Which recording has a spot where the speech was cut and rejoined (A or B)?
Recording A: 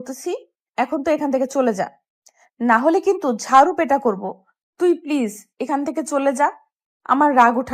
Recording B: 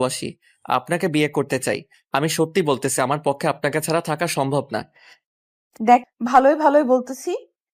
B